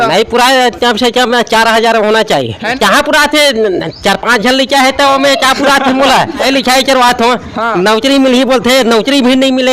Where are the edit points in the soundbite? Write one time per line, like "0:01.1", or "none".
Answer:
0:02.7
0:06.4